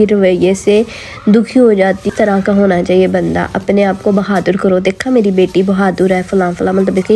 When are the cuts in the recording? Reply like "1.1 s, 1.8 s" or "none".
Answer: none